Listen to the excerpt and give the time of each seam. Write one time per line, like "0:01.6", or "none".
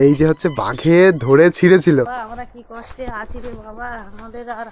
0:02.1

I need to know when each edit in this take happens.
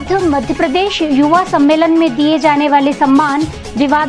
none

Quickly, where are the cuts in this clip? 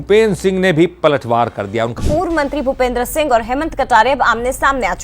0:02.0

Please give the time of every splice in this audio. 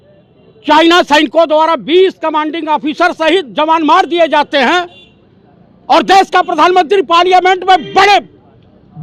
none

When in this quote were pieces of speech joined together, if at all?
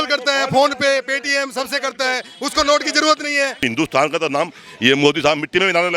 0:03.6

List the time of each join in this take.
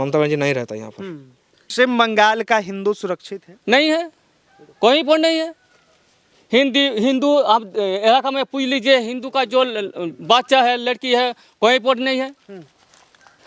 0:01.7

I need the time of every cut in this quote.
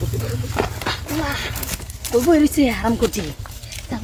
none

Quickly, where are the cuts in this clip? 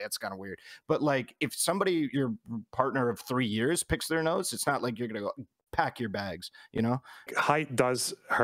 0:07.3

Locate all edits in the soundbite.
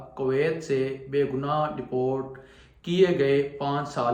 none

